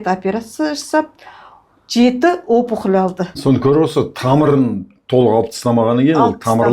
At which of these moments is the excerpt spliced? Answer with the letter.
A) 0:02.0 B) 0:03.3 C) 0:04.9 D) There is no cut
B